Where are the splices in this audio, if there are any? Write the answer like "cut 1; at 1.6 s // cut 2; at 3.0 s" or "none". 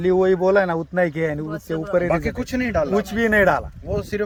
none